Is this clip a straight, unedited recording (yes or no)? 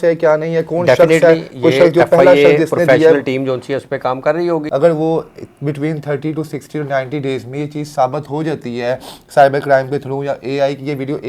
no